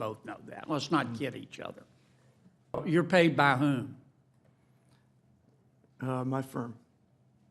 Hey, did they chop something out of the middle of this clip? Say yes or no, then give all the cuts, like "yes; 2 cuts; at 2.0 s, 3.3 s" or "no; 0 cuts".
yes; 1 cut; at 2.8 s